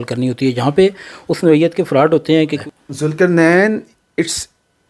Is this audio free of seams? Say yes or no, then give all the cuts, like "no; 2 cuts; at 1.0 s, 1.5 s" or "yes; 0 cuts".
no; 1 cut; at 2.6 s